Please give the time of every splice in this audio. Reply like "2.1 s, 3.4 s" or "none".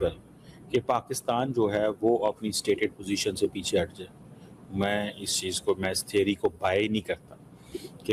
none